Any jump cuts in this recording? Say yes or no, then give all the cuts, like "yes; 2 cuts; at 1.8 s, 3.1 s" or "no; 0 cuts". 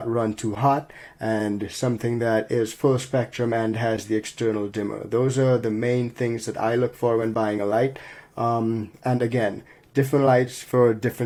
no; 0 cuts